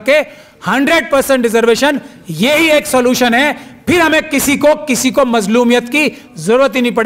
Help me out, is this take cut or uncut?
uncut